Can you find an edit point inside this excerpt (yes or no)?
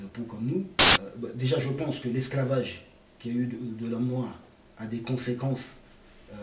yes